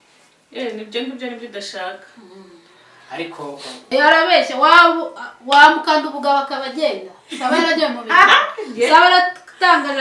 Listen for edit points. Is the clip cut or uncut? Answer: cut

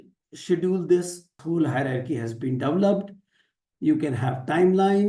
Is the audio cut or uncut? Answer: cut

